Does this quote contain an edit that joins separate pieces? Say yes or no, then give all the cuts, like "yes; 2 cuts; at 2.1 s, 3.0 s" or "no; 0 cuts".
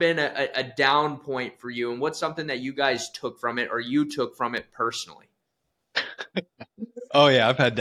no; 0 cuts